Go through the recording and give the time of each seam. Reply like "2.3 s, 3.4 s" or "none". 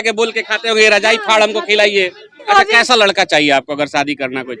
2.5 s